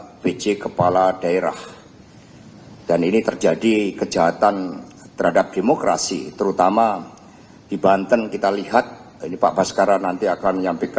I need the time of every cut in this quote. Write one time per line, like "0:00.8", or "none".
none